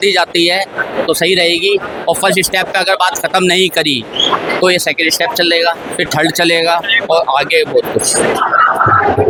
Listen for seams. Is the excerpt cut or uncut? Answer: uncut